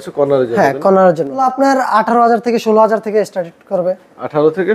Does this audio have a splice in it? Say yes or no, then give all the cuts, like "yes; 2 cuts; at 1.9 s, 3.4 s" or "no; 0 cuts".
yes; 1 cut; at 1.4 s